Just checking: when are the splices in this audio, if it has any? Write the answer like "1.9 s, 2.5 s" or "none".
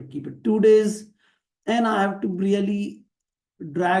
none